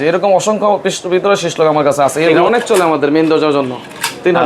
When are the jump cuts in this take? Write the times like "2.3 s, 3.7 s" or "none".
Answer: 2.4 s